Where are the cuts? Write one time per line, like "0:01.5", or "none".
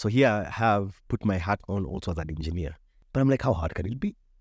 none